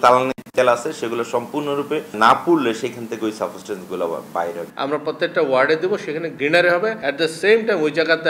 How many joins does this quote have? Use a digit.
4